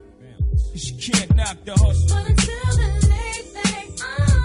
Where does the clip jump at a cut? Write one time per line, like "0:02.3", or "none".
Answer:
0:01.3